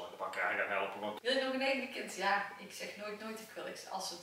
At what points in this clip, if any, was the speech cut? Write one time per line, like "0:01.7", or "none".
0:01.2